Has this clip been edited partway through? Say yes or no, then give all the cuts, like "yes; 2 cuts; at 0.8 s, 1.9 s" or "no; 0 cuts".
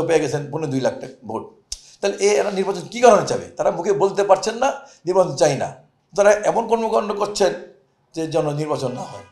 no; 0 cuts